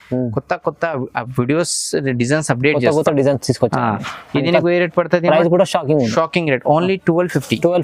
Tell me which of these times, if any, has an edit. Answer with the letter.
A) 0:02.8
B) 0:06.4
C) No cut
C